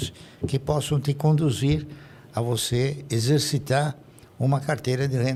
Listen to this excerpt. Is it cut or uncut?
uncut